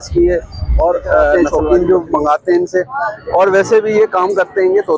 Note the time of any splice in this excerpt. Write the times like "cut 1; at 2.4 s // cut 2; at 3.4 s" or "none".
cut 1; at 1.3 s